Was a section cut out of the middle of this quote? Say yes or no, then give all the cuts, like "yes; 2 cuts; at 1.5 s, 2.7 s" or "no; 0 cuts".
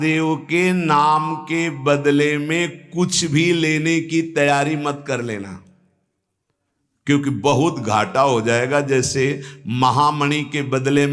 no; 0 cuts